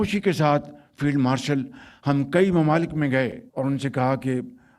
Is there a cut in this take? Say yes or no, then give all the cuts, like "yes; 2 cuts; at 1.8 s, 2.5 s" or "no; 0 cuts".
yes; 1 cut; at 3.4 s